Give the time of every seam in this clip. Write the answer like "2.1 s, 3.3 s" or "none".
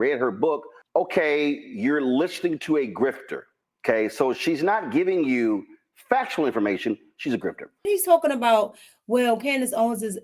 7.8 s